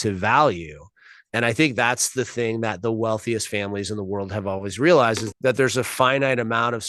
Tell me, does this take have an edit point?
yes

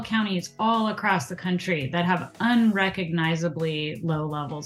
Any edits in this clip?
no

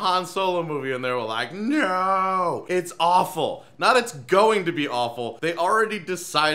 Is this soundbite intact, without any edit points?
no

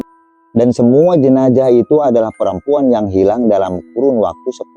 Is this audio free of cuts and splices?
yes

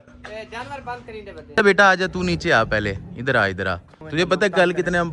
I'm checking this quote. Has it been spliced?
yes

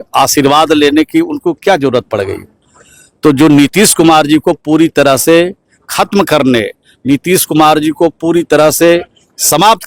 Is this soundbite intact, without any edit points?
yes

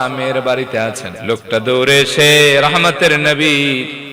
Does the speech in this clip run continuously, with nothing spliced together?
no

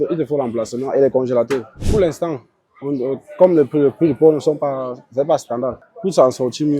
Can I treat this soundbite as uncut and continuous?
no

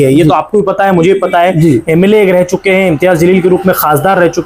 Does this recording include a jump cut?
no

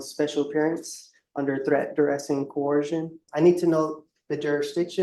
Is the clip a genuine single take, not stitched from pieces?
no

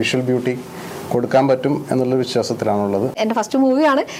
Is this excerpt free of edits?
no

